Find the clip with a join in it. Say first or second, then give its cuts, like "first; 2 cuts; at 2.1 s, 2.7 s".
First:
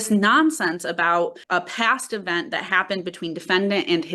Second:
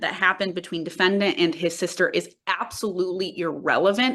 first; 1 cut; at 1.4 s